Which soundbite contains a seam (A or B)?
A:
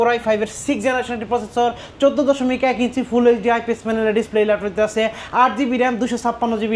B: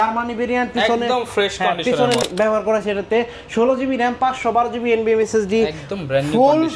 B